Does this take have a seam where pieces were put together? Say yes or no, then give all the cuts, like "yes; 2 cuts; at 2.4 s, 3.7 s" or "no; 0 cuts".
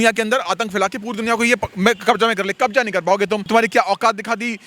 yes; 1 cut; at 3.4 s